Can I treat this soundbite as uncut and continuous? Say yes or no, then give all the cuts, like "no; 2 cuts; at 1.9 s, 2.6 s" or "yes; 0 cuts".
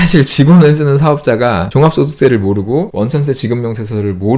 yes; 0 cuts